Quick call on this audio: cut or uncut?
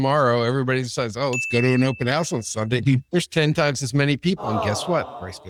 uncut